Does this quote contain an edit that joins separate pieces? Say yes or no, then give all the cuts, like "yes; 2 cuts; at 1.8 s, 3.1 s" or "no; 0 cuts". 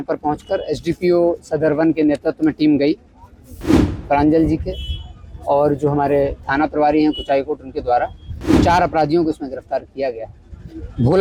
no; 0 cuts